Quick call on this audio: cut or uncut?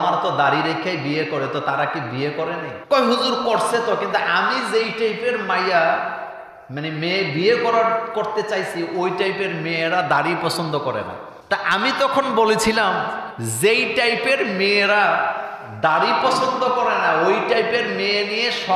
uncut